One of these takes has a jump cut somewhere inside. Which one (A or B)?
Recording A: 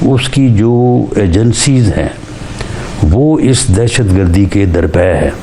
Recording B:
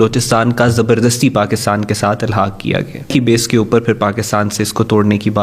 B